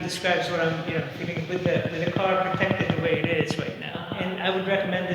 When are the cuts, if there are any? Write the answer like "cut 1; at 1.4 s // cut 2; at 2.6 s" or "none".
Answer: cut 1; at 4.1 s